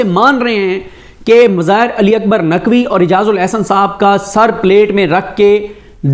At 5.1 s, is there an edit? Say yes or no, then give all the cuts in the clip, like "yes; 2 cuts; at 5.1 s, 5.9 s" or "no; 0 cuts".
no; 0 cuts